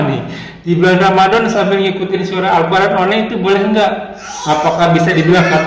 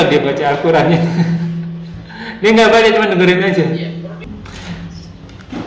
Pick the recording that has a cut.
second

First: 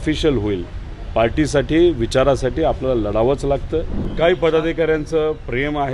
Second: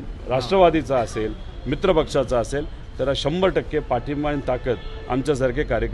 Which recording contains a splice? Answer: first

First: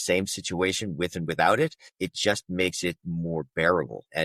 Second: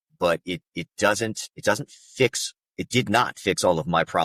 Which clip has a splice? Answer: first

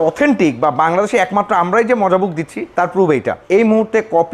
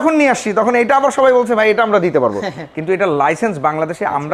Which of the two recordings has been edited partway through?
first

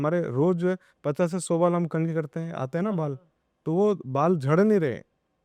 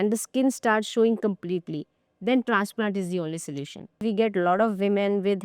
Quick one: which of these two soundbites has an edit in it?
second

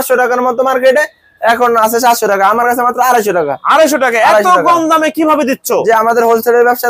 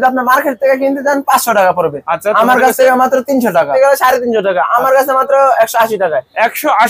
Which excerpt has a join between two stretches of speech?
second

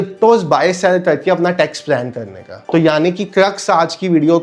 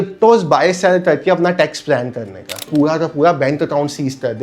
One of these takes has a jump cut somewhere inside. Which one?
second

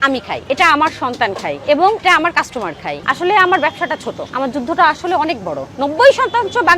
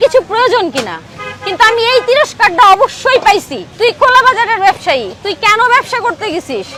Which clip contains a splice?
first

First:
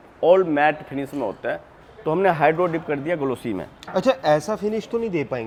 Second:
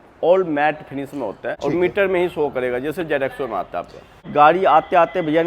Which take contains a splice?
second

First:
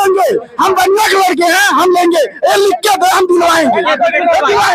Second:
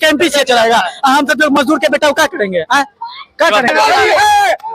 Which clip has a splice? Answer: second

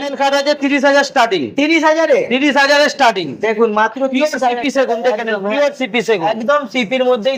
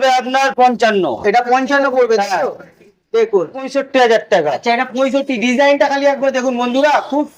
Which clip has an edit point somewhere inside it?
second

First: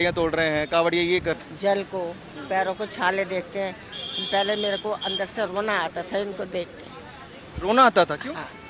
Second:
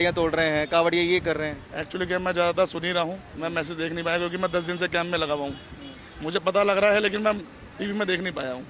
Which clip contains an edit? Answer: first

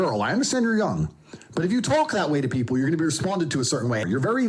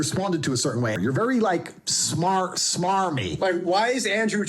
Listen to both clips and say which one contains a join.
second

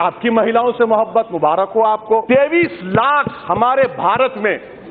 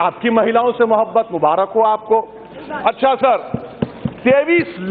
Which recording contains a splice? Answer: first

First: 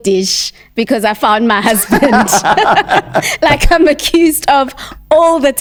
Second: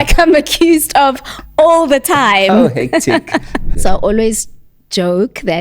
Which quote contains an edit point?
second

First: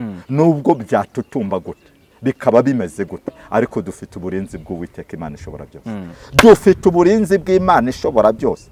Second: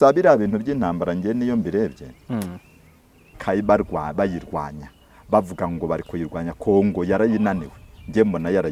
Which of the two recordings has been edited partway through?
second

